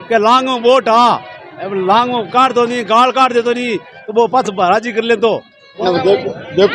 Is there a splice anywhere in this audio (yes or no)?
yes